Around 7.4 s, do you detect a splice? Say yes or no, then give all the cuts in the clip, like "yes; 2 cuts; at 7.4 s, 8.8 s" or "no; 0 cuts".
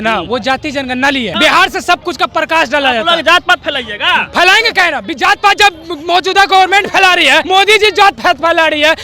yes; 2 cuts; at 1.3 s, 7.4 s